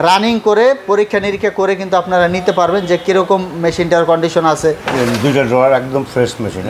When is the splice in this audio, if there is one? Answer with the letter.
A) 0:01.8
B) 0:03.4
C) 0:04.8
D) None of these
C